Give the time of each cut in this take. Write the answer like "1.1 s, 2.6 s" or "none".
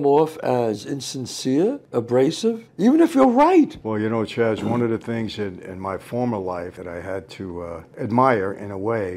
3.8 s, 6.8 s, 7.9 s